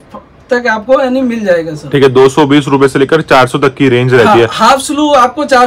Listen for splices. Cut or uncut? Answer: uncut